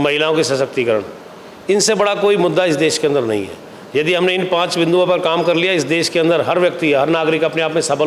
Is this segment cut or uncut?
uncut